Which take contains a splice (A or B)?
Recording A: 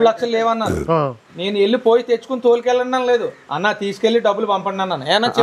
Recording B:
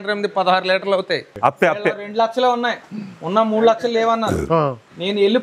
B